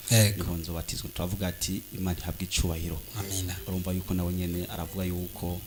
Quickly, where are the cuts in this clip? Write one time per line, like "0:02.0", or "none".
none